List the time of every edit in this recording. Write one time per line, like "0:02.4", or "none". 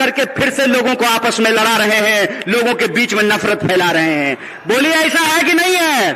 none